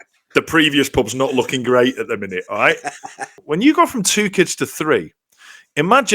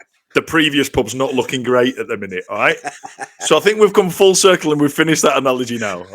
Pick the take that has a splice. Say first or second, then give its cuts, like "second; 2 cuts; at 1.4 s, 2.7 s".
first; 1 cut; at 3.3 s